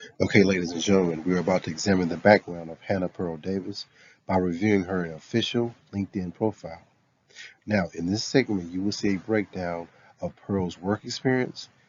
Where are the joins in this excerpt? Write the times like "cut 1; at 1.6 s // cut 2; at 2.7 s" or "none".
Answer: none